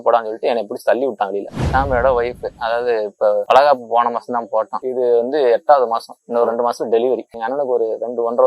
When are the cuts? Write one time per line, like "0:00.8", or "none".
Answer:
0:01.5
0:03.4
0:04.8
0:07.3